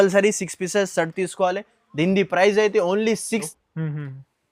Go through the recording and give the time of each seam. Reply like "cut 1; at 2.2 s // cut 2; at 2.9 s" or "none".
cut 1; at 3.5 s